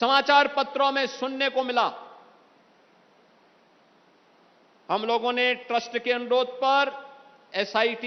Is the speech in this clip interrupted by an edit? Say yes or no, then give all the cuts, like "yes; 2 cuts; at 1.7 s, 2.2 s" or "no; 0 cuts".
no; 0 cuts